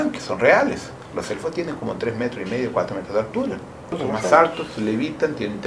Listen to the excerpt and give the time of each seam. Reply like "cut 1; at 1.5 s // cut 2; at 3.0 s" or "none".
cut 1; at 1.0 s // cut 2; at 4.0 s